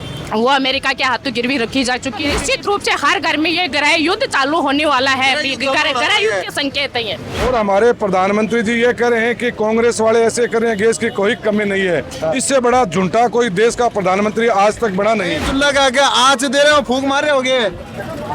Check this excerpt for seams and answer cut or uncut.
cut